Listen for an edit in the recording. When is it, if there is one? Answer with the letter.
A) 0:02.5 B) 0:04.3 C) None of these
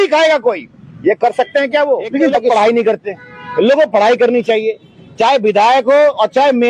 A